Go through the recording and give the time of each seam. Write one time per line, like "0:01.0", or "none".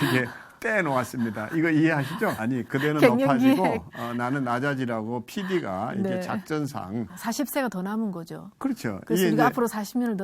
0:02.4
0:07.1